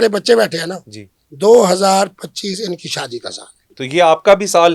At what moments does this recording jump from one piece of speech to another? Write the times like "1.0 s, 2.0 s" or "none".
3.8 s